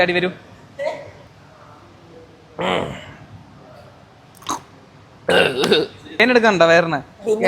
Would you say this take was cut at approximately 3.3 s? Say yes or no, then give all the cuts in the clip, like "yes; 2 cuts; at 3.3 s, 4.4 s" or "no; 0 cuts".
no; 2 cuts; at 1.1 s, 6.2 s